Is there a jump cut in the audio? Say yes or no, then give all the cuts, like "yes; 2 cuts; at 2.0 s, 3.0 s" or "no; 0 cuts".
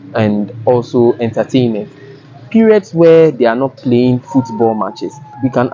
no; 0 cuts